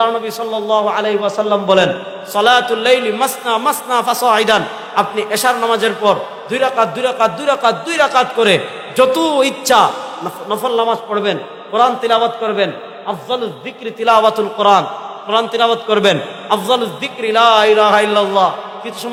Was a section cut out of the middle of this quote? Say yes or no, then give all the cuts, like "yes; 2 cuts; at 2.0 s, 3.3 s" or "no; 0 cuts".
no; 0 cuts